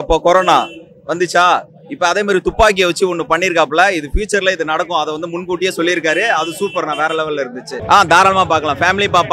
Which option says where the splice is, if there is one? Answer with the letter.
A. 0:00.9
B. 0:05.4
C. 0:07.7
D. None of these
D